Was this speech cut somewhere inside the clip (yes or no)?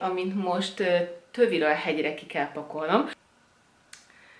yes